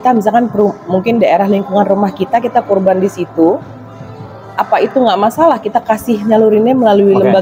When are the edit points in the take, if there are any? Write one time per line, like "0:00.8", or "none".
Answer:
none